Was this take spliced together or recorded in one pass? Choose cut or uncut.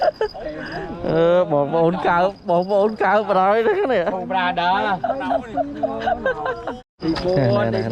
cut